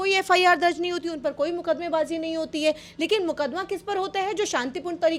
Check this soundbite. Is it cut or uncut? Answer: uncut